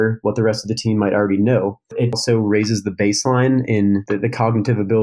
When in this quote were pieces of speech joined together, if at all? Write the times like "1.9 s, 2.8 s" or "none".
2.2 s, 4.0 s